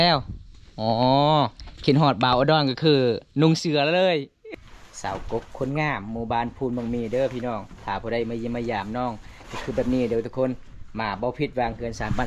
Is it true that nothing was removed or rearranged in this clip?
no; 1 cut; at 4.4 s

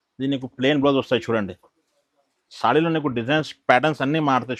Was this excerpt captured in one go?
yes; 0 cuts

